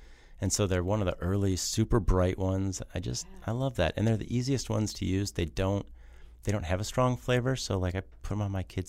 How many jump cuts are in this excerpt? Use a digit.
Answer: 0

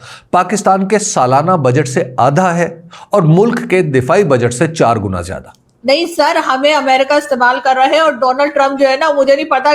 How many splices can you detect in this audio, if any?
1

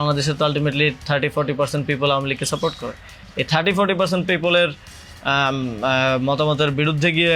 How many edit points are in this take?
0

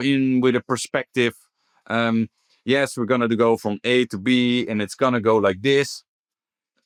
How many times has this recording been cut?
0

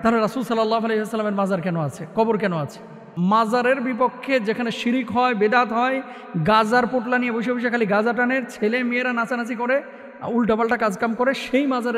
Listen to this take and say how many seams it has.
1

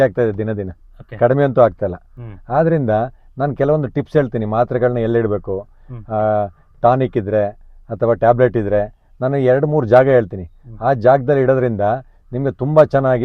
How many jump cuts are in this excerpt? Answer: 0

